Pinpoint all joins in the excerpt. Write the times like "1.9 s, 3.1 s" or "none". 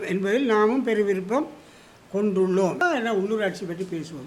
2.8 s